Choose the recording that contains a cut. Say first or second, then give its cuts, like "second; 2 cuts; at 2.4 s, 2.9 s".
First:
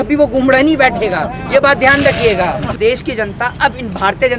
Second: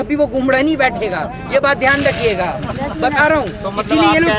first; 1 cut; at 2.7 s